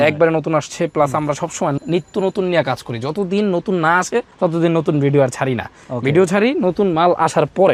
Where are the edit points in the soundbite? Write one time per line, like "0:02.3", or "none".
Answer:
none